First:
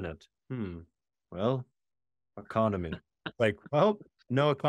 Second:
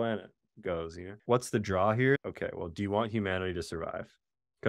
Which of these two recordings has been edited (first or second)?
second